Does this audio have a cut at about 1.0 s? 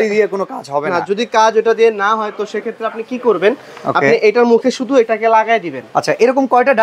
no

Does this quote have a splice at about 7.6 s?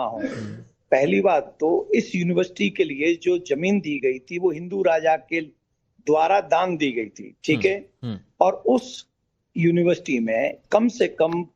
no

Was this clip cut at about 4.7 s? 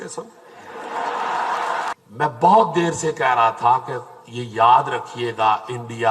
no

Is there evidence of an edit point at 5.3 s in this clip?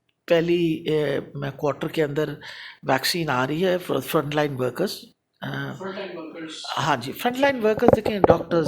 no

